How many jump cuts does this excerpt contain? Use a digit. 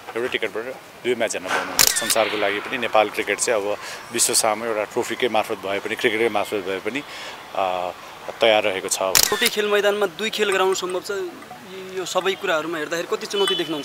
2